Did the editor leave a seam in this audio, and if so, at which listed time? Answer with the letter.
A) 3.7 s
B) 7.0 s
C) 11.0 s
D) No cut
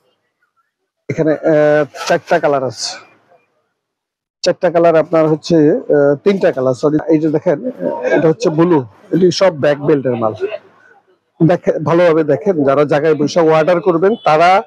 B